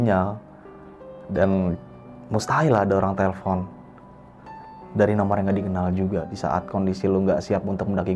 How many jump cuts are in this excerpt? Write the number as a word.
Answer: one